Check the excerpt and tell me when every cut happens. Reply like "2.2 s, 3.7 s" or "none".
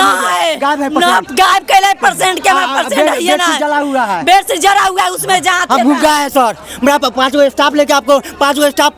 none